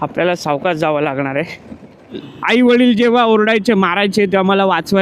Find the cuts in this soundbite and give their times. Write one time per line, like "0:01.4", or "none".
0:02.3